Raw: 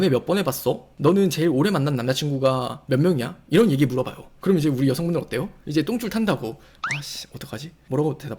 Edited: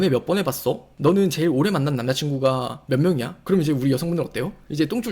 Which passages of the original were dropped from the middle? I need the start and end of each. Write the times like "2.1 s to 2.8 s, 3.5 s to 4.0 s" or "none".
3.3 s to 4.3 s